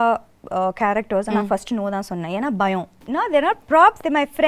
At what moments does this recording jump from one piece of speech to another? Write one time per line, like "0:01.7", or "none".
0:03.0